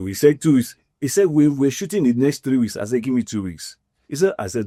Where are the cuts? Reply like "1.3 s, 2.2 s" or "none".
none